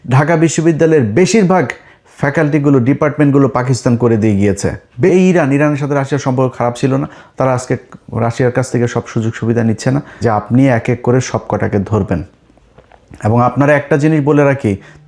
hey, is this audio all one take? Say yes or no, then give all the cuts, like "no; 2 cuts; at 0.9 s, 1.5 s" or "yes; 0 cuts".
no; 2 cuts; at 5.1 s, 10.1 s